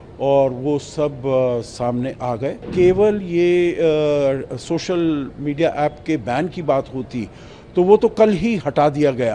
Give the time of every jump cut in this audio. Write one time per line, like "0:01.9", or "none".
0:02.7

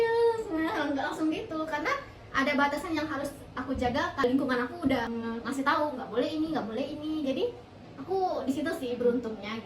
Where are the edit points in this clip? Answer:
0:04.2
0:05.1

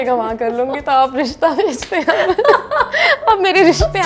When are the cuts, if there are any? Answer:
none

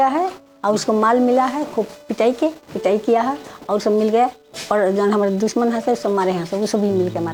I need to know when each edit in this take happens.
none

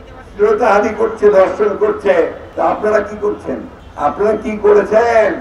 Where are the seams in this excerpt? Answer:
0:02.4

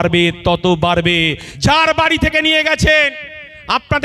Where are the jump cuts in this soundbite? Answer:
none

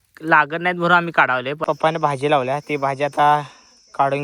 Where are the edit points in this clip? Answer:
0:01.6

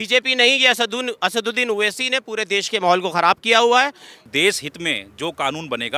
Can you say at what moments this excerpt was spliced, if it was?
0:04.3

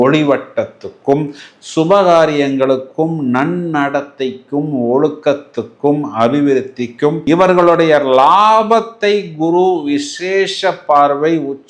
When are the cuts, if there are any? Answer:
0:07.2

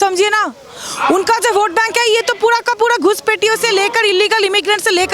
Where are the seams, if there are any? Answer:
none

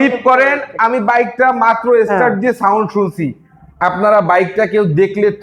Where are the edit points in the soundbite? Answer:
none

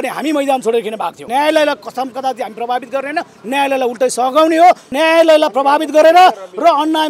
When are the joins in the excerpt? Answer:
0:01.3
0:04.9

